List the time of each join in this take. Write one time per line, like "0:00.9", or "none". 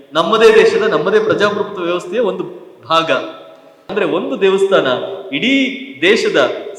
0:03.7